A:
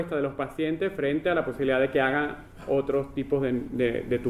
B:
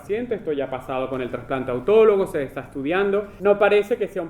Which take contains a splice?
B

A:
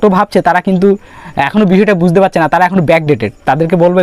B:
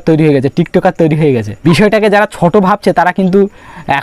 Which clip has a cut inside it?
B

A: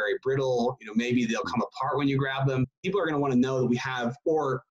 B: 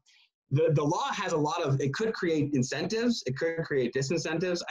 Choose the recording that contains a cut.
A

